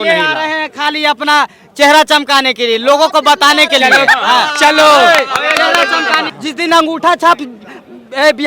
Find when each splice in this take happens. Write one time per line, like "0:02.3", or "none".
0:06.3